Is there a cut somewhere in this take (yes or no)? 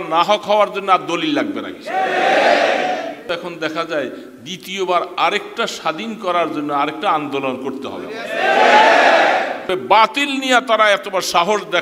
yes